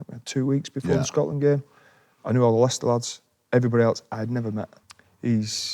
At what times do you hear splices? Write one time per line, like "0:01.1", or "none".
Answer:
0:04.8